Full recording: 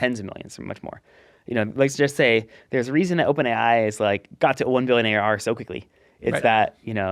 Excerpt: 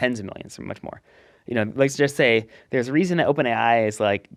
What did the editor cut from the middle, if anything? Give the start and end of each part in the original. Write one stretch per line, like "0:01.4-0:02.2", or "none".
none